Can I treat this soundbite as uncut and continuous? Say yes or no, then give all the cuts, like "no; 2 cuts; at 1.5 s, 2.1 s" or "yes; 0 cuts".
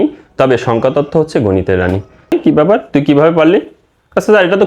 no; 1 cut; at 2.3 s